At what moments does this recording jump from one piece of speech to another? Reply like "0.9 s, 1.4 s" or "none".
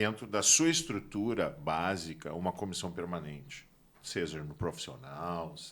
none